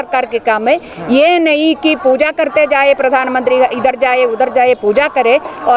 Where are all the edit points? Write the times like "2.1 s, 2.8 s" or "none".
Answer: none